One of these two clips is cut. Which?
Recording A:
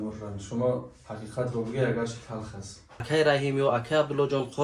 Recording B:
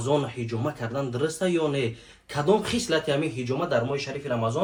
A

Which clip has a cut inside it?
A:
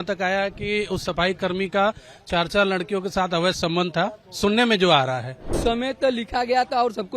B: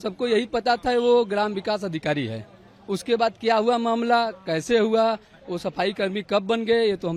A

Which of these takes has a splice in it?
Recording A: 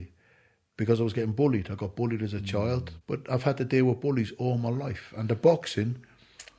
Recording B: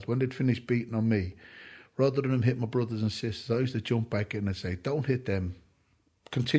A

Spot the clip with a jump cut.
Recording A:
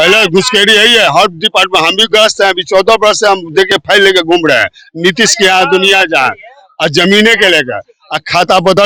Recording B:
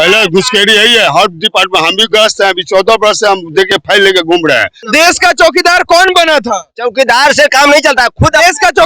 B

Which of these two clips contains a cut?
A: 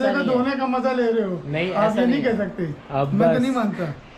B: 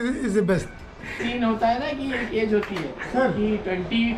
B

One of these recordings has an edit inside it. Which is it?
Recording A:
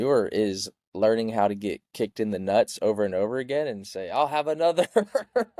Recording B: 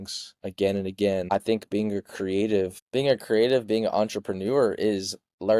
B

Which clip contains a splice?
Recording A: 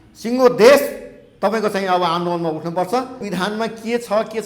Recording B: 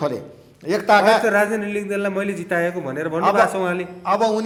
A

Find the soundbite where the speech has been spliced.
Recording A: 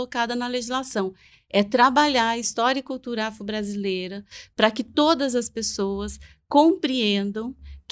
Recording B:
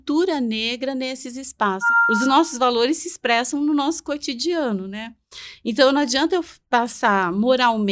B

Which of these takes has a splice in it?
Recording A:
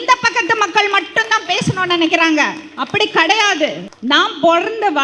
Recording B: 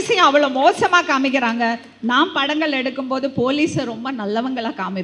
A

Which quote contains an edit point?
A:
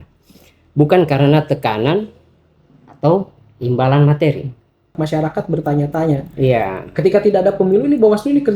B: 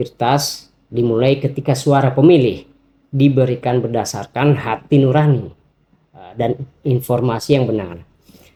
A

